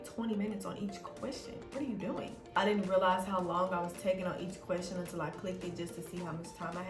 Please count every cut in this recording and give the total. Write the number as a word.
one